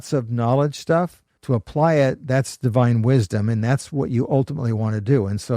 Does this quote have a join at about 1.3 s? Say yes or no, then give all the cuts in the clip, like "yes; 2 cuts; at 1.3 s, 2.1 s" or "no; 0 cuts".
yes; 1 cut; at 1.3 s